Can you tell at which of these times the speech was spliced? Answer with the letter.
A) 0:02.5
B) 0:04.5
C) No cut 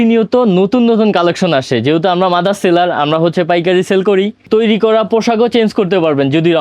B